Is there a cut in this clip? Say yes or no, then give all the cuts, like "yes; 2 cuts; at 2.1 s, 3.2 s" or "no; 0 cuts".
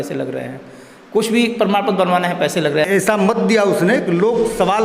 yes; 1 cut; at 2.8 s